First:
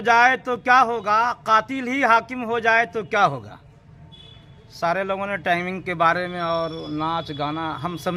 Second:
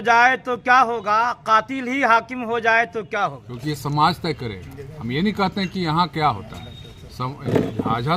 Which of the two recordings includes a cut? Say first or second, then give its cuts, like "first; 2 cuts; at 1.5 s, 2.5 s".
second; 1 cut; at 3.5 s